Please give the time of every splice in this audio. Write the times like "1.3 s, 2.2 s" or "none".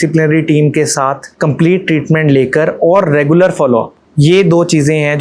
1.3 s, 4.0 s